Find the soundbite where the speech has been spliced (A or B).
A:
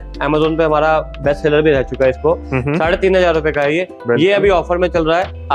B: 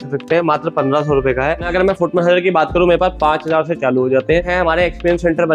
B